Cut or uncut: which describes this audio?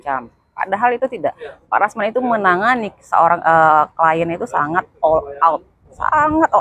uncut